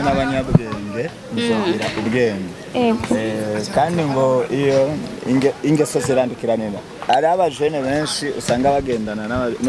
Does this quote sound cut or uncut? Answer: uncut